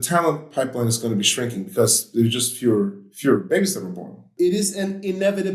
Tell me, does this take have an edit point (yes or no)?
yes